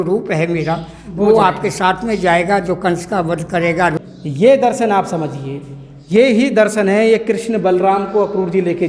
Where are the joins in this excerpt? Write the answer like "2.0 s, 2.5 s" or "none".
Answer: 3.9 s